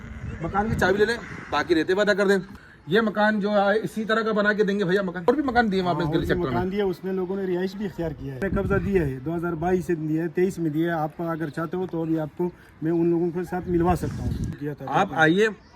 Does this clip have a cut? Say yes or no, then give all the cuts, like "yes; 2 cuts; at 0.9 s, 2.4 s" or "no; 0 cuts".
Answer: yes; 4 cuts; at 2.6 s, 5.3 s, 8.4 s, 14.6 s